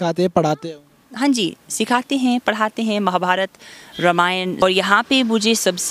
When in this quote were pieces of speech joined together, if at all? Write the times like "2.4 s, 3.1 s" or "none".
4.6 s